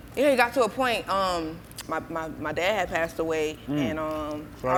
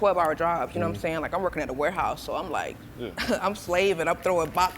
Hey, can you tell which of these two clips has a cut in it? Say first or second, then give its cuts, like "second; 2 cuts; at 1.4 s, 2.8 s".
second; 1 cut; at 2.9 s